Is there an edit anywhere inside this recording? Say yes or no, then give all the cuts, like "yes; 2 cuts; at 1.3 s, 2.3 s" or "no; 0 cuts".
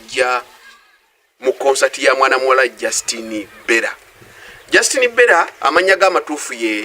yes; 1 cut; at 5.6 s